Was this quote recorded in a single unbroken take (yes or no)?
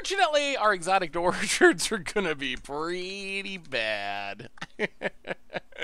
yes